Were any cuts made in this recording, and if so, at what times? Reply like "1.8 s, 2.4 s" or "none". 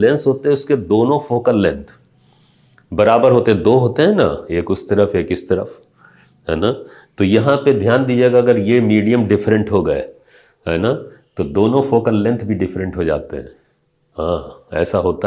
none